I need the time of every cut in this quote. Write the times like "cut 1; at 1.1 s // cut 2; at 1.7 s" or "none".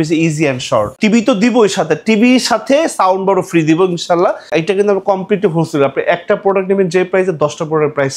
cut 1; at 0.9 s // cut 2; at 4.5 s